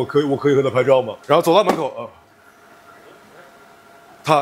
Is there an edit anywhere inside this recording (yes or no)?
yes